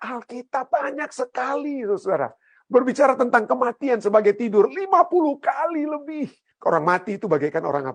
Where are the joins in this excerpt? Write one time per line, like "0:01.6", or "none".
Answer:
0:06.5